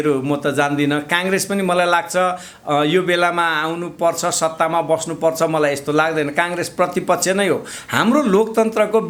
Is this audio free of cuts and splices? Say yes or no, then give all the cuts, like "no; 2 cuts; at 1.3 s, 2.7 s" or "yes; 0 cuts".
yes; 0 cuts